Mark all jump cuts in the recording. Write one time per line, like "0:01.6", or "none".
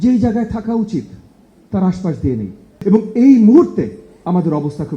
0:02.8